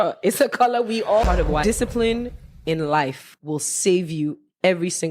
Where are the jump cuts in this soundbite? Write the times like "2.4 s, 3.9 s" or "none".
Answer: 1.2 s, 3.3 s